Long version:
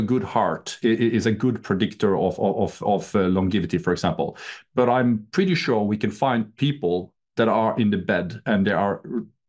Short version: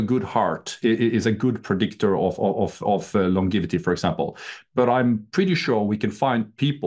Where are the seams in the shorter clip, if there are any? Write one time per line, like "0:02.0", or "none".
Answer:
none